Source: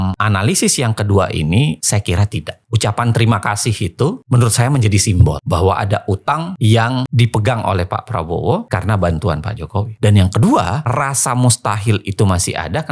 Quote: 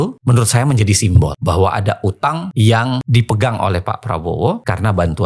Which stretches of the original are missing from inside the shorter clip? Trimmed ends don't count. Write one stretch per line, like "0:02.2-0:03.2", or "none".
none